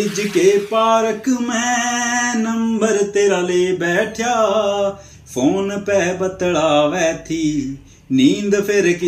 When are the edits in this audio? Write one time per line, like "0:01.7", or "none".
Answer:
none